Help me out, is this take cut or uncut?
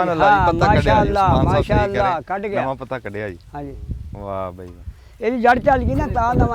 uncut